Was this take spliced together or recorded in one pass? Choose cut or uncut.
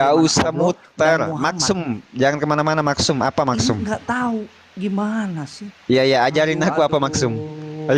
uncut